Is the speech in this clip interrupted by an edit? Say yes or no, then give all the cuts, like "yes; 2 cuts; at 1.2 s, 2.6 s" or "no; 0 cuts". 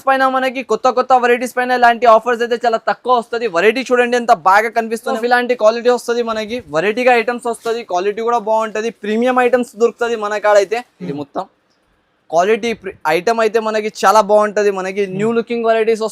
yes; 2 cuts; at 5.2 s, 11.1 s